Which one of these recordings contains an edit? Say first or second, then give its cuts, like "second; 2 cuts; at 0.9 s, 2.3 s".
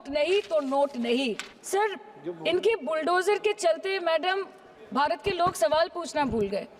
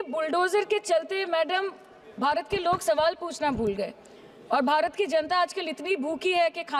first; 1 cut; at 1.5 s